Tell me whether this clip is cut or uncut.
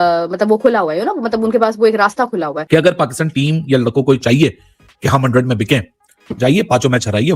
cut